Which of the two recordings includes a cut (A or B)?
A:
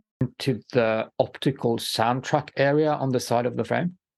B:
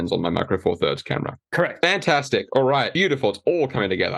B